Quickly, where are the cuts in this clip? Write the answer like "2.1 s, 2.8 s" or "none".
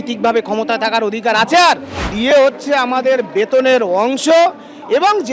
2.1 s